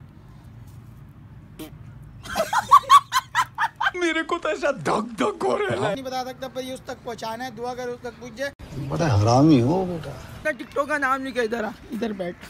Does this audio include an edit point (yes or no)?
yes